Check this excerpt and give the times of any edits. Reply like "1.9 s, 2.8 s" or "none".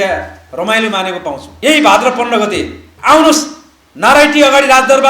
1.5 s